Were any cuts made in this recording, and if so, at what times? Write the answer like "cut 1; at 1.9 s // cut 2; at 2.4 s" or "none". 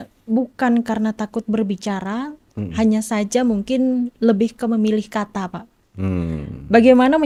none